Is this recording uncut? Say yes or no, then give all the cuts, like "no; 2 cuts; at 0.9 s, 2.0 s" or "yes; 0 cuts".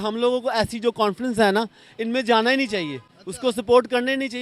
yes; 0 cuts